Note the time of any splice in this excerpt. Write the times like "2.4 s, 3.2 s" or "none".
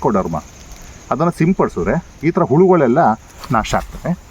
3.3 s